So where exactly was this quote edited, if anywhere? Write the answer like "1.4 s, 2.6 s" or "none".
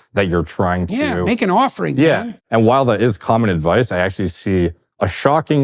2.2 s